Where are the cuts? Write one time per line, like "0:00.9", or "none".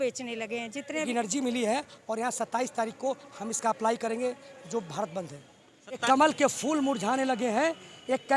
0:01.1
0:06.0